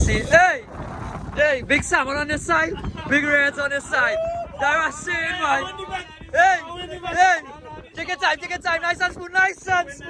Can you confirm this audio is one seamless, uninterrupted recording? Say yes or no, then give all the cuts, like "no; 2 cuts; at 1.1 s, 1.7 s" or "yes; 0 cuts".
yes; 0 cuts